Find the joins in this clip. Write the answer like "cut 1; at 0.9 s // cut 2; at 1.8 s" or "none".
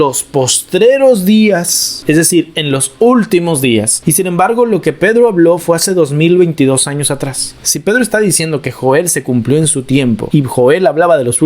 cut 1; at 4.0 s // cut 2; at 10.2 s